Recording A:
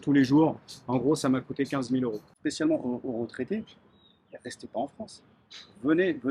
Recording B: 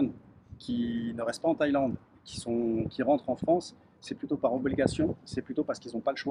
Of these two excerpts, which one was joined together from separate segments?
A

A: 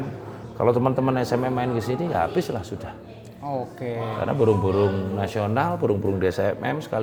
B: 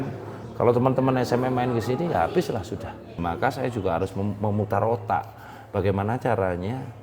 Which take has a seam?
B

